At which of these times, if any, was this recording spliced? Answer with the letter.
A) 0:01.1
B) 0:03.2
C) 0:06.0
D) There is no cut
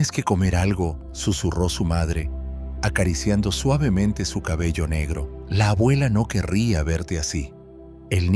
A